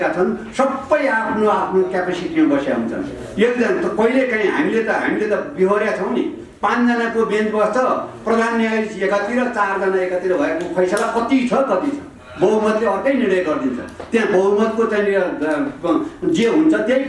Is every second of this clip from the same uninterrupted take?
yes; 0 cuts

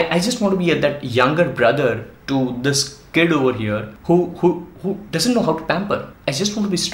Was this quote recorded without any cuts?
no; 2 cuts; at 3.9 s, 6.1 s

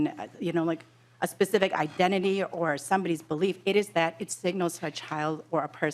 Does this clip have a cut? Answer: no; 0 cuts

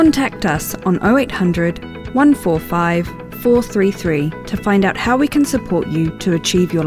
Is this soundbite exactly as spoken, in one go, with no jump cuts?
yes; 0 cuts

